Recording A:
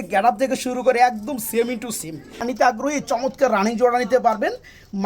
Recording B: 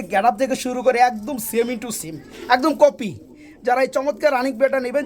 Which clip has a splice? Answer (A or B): A